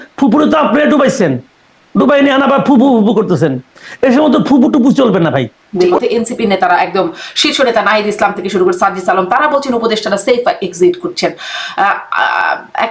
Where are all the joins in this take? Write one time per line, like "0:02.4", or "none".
0:05.8